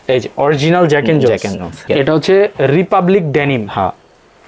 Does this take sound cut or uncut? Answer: cut